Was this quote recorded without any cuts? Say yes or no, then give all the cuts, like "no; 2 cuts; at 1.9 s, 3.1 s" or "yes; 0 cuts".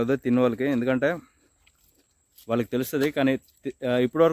yes; 0 cuts